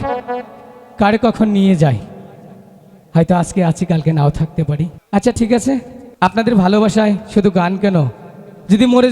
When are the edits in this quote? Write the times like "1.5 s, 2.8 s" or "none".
5.0 s, 6.0 s